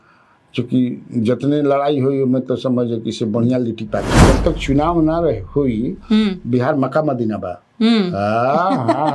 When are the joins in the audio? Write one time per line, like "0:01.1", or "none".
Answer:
0:04.1